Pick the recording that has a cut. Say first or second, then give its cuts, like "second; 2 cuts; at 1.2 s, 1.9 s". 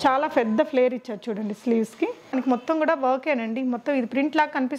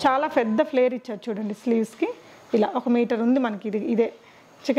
first; 1 cut; at 2.3 s